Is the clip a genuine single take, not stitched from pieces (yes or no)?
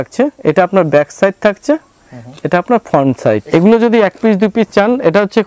no